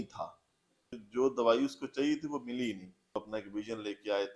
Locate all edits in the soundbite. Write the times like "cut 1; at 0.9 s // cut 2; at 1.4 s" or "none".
cut 1; at 1.0 s // cut 2; at 3.2 s